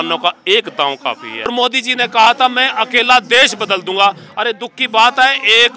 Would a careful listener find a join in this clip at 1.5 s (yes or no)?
yes